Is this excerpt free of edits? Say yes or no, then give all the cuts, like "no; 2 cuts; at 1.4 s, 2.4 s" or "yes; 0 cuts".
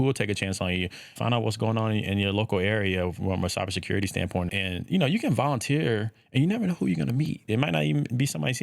no; 3 cuts; at 1.1 s, 4.5 s, 7.5 s